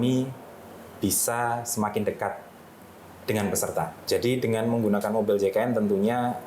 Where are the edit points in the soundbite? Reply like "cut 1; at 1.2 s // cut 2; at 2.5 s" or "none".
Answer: cut 1; at 4.0 s